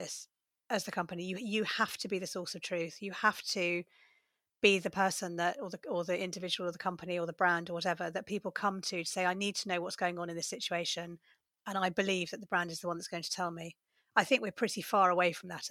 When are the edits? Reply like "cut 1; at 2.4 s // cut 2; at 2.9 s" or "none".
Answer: none